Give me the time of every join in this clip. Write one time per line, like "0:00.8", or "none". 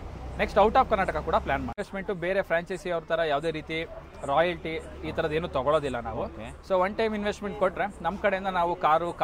0:01.8